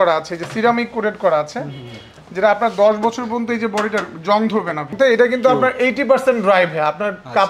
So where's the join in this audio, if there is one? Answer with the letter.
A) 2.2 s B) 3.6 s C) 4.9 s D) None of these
C